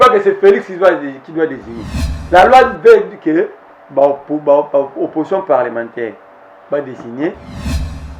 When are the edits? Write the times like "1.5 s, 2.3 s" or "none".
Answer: none